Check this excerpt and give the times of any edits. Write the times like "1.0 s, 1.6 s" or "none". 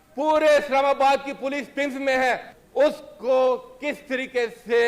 2.6 s